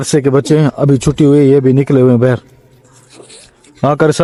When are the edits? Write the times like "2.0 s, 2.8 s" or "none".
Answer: none